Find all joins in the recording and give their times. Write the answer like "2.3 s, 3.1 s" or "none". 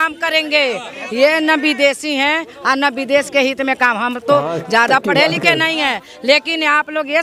none